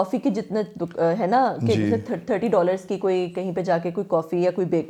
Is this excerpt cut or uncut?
uncut